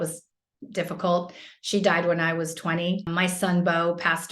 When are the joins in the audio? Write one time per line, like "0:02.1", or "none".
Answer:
none